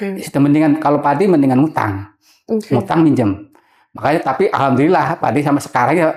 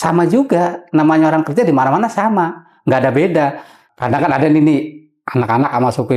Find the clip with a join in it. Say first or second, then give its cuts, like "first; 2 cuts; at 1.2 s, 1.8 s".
second; 1 cut; at 3.9 s